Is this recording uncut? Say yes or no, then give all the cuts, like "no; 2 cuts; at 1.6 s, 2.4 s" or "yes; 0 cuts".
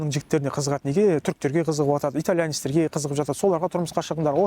yes; 0 cuts